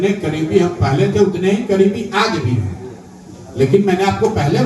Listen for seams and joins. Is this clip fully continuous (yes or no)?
yes